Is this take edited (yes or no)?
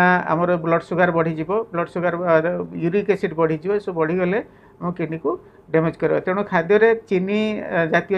no